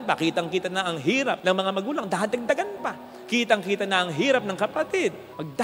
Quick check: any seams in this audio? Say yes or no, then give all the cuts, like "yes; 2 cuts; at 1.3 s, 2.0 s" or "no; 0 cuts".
no; 0 cuts